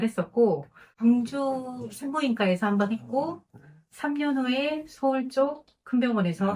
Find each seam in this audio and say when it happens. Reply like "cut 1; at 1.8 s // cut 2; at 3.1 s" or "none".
cut 1; at 0.9 s

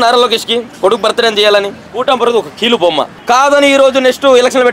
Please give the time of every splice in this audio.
cut 1; at 1.8 s // cut 2; at 3.1 s

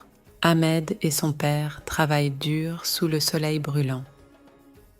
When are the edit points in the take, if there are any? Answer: cut 1; at 4.1 s

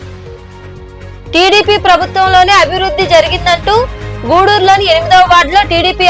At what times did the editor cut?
cut 1; at 1.1 s

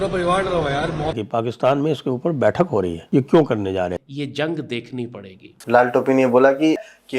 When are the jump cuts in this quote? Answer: cut 1; at 1.2 s // cut 2; at 4.0 s

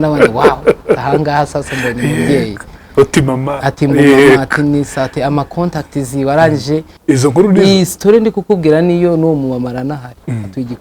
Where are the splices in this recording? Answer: cut 1; at 6.9 s

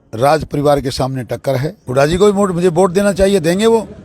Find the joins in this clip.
cut 1; at 1.8 s

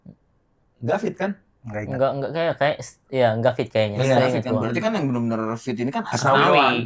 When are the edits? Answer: none

